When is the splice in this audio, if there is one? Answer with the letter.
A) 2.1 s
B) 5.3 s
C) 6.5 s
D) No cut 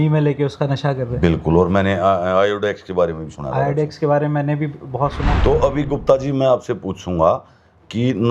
B